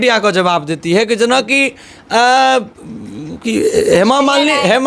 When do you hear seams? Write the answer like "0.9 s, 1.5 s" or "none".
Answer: none